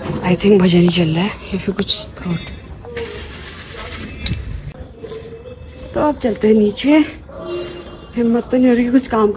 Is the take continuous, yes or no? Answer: yes